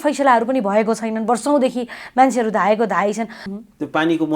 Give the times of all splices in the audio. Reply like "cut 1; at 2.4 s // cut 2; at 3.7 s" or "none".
cut 1; at 3.4 s